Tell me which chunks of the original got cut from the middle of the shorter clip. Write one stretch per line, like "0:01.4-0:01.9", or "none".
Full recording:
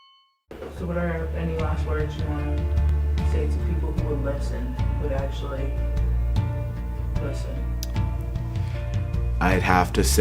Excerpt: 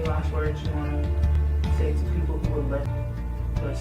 0:04.4-0:06.5